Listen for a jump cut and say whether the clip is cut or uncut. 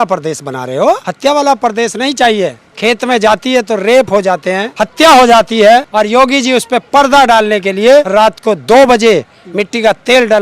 cut